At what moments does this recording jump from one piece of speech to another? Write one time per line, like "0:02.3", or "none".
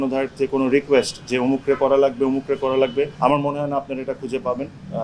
0:03.1